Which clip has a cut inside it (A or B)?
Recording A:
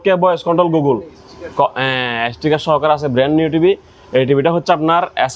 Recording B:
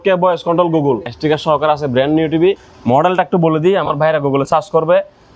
B